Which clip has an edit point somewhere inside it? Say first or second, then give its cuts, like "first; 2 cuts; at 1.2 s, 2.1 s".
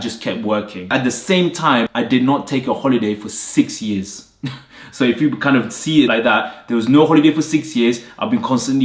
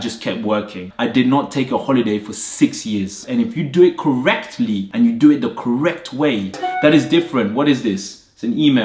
second; 3 cuts; at 0.9 s, 3.2 s, 6.6 s